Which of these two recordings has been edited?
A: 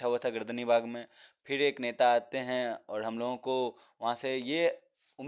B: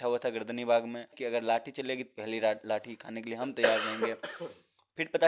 B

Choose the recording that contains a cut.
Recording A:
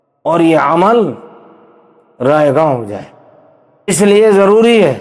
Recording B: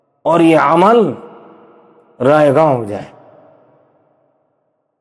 A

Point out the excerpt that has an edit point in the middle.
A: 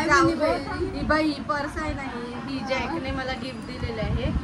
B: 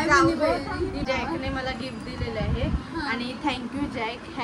B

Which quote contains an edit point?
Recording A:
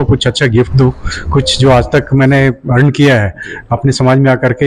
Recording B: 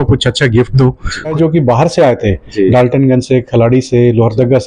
B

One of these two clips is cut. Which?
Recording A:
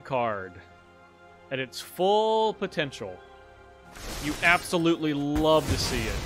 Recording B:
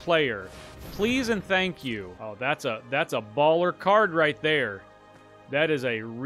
B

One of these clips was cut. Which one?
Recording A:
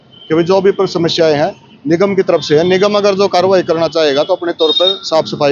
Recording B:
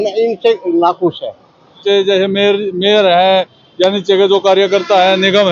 B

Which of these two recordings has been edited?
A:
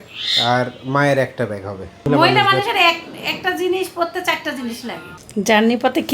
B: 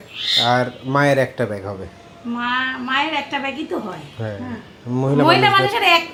A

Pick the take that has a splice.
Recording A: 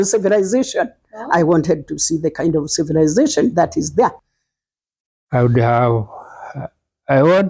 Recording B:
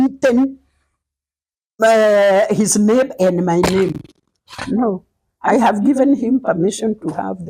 A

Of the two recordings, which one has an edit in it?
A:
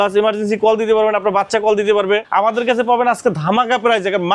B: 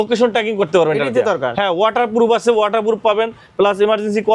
A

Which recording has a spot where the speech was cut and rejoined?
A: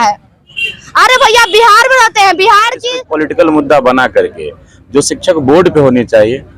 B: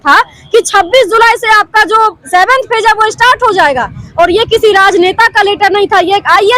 A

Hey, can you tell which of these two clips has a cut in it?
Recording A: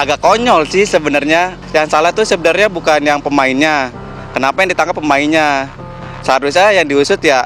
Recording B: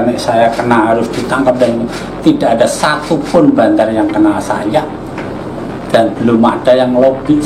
A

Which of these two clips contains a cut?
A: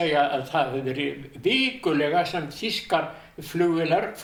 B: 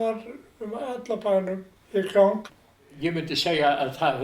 B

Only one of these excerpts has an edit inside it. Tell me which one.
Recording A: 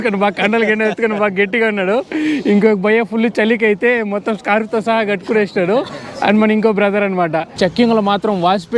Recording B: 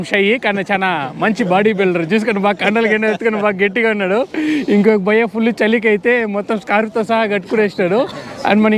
A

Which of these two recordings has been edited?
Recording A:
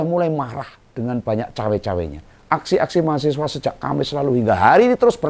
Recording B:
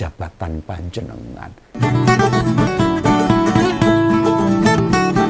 B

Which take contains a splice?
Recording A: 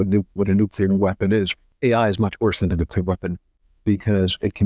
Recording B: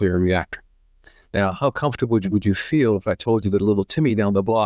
A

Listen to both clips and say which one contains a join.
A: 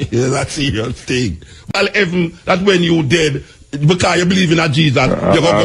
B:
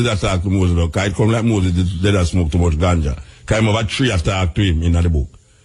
A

